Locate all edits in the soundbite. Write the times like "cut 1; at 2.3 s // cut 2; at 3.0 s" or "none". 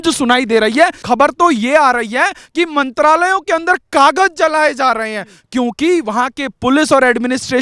cut 1; at 1.0 s

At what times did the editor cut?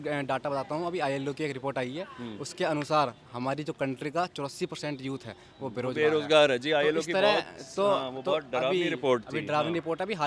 none

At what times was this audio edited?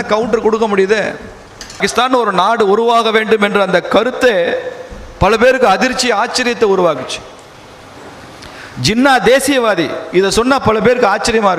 cut 1; at 1.8 s

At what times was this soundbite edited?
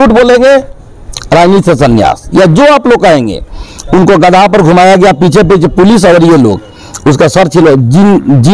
none

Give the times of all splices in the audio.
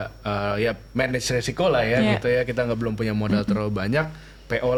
none

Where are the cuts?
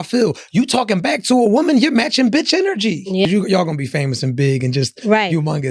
cut 1; at 3.2 s

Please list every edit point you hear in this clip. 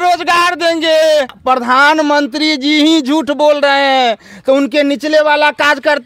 cut 1; at 1.4 s

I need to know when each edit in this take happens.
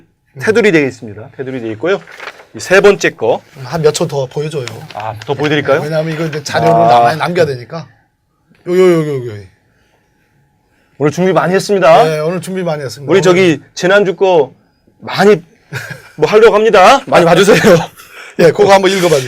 cut 1; at 1.8 s

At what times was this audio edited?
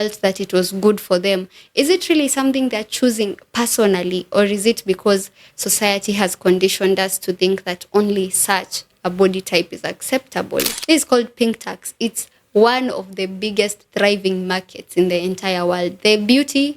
cut 1; at 10.7 s

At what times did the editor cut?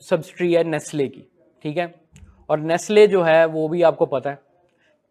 none

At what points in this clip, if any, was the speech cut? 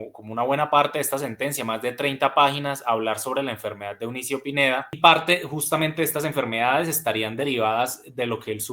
cut 1; at 4.9 s

